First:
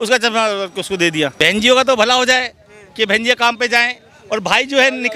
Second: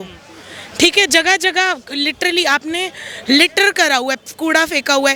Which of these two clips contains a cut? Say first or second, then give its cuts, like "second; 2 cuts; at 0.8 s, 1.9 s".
first; 1 cut; at 1.3 s